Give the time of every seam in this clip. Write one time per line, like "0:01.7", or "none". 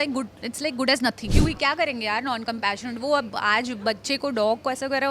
0:01.3